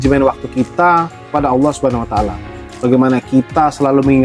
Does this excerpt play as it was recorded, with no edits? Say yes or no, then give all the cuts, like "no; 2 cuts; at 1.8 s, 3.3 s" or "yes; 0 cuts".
yes; 0 cuts